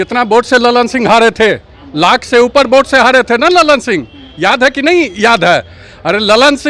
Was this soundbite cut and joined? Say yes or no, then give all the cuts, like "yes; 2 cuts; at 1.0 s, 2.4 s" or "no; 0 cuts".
no; 0 cuts